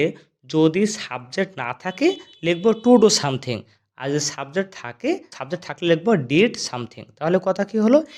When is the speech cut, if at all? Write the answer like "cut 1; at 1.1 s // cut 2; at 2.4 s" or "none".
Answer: cut 1; at 5.3 s